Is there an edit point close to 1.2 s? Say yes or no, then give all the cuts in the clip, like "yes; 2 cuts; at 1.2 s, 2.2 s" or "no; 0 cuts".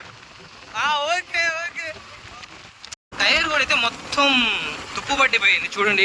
no; 1 cut; at 2.9 s